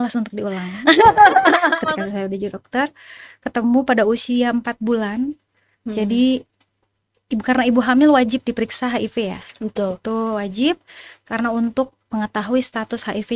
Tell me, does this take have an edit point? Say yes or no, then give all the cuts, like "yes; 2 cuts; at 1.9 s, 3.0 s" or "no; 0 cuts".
yes; 1 cut; at 1.8 s